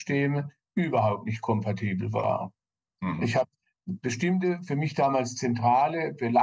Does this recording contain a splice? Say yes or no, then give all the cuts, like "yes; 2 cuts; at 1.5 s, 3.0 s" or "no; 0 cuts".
no; 0 cuts